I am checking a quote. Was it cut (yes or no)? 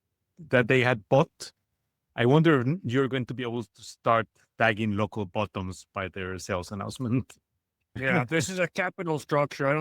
yes